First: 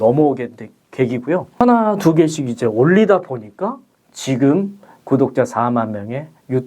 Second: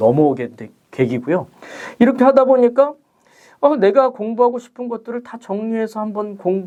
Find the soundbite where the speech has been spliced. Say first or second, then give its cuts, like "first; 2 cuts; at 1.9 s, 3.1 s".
first; 1 cut; at 1.6 s